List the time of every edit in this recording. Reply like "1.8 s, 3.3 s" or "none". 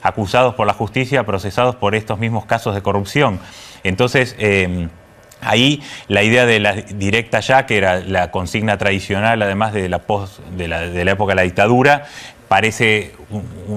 7.5 s